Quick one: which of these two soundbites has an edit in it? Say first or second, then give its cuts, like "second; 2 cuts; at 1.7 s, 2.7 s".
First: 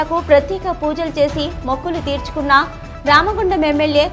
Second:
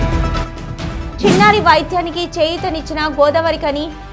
second; 1 cut; at 1.0 s